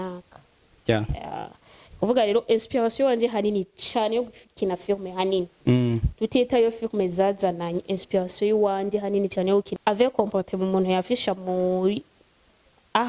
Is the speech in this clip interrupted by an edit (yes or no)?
yes